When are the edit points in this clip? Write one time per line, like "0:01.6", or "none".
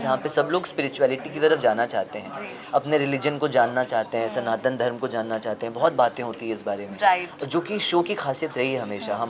none